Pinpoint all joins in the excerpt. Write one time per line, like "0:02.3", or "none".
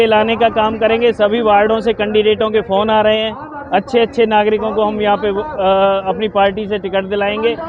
none